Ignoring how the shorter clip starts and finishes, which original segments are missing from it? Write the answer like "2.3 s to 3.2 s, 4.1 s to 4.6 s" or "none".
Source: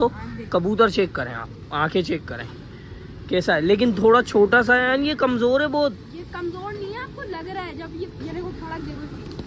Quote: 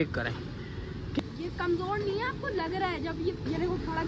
3.3 s to 5.9 s